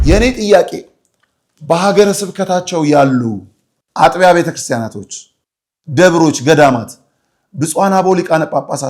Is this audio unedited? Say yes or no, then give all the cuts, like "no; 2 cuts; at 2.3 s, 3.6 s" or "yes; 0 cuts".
yes; 0 cuts